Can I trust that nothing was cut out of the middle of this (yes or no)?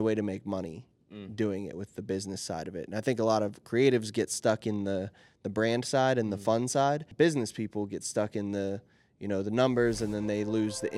no